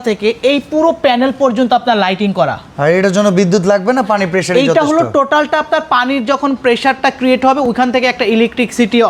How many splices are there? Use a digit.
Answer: 0